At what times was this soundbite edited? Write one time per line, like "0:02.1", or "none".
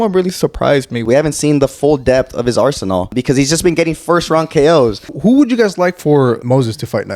0:01.0
0:03.1
0:05.1
0:06.4